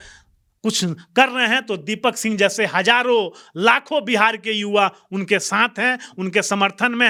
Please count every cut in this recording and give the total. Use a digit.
0